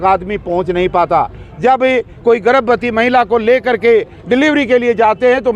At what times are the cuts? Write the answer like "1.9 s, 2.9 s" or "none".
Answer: none